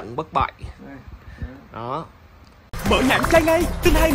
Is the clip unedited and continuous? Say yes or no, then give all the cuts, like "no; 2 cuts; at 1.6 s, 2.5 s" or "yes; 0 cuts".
no; 1 cut; at 2.8 s